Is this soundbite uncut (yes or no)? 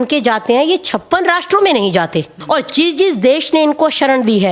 no